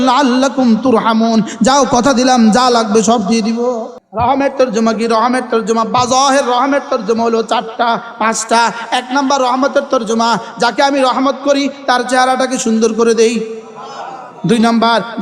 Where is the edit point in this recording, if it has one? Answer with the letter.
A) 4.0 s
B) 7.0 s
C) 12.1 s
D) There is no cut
A